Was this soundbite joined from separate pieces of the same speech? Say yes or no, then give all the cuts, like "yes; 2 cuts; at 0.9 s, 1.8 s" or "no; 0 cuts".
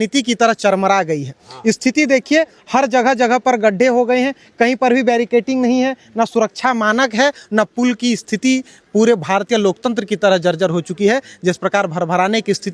no; 0 cuts